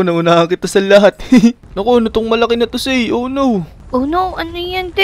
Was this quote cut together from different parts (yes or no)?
yes